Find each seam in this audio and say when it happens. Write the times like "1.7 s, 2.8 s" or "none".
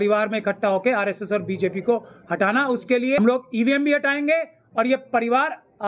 3.2 s